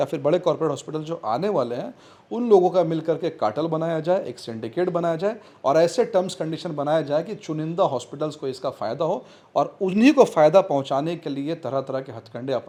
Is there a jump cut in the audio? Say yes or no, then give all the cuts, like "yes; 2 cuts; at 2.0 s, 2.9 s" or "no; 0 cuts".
no; 0 cuts